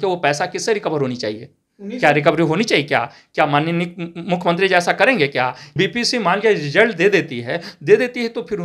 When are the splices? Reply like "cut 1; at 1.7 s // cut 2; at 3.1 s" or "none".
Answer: cut 1; at 5.6 s